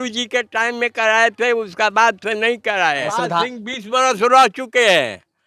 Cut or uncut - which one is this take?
cut